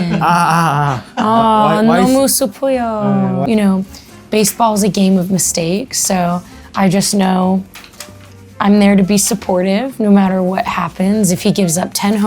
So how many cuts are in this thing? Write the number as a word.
one